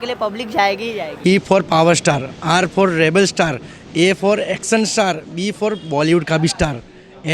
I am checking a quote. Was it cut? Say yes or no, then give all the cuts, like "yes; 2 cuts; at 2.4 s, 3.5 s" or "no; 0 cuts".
yes; 1 cut; at 1.1 s